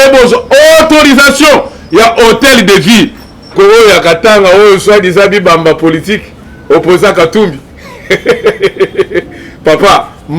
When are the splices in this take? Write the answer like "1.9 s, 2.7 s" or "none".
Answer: 3.5 s